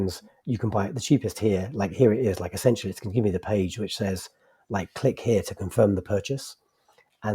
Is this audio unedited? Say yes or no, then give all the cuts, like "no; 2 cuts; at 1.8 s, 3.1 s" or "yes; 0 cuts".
yes; 0 cuts